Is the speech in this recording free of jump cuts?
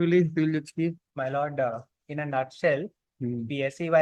yes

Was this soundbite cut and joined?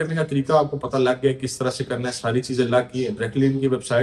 no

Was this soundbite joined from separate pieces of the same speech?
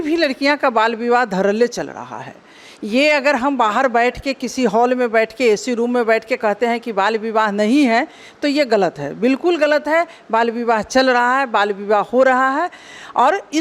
no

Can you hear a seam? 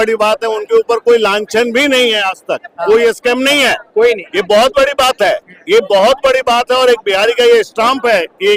no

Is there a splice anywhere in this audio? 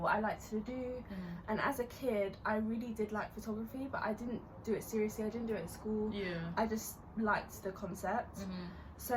no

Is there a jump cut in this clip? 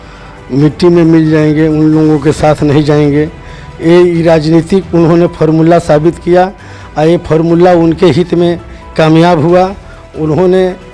no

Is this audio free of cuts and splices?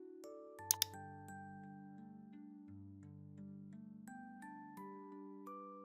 yes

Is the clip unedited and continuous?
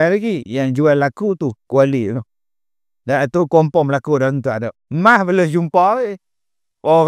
yes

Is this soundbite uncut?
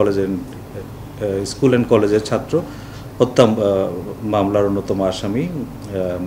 yes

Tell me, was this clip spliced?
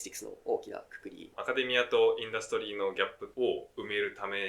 yes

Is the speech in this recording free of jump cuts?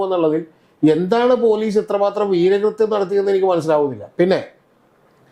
yes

